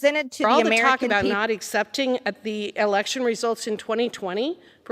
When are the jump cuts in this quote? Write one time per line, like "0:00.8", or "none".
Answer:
0:01.0